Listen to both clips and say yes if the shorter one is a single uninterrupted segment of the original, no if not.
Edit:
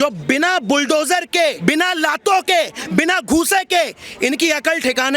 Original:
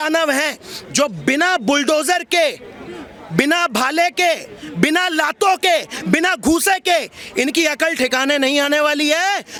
no